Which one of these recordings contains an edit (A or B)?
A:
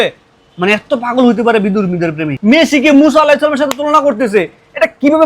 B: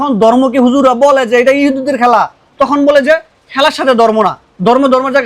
A